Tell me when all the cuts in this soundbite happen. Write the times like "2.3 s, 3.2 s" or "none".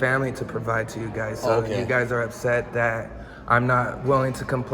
1.9 s